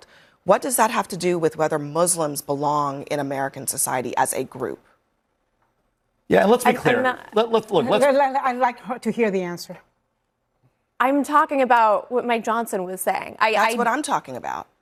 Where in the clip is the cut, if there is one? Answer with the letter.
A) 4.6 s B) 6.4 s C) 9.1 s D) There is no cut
D